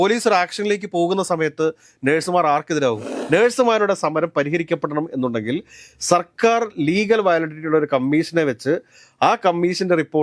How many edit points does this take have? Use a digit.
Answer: 1